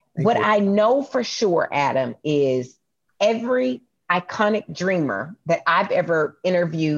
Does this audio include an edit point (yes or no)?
no